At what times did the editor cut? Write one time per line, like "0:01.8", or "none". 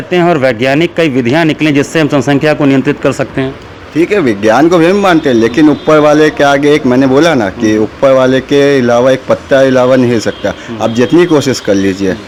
none